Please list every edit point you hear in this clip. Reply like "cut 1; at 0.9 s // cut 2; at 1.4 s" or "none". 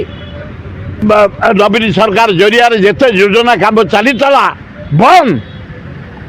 cut 1; at 1.0 s